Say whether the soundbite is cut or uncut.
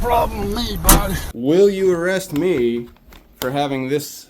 cut